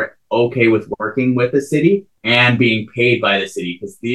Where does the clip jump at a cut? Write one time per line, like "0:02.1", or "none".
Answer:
0:02.1